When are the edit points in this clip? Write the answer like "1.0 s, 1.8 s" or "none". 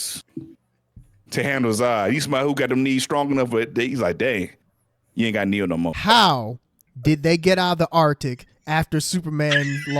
5.9 s